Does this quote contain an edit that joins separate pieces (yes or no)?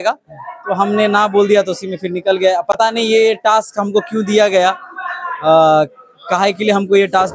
no